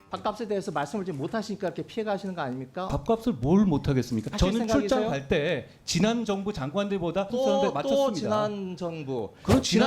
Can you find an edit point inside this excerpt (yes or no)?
yes